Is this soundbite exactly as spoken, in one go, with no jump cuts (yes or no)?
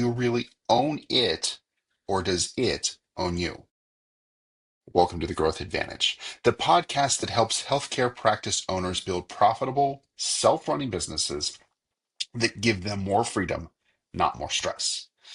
yes